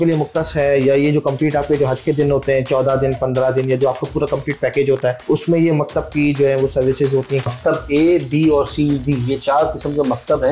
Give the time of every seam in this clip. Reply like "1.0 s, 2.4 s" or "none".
5.2 s, 7.5 s